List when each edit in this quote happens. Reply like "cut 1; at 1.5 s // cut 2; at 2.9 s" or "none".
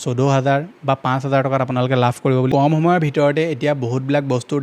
cut 1; at 2.5 s